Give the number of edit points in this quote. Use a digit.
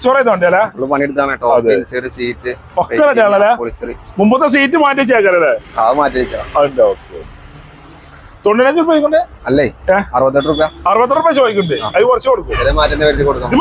0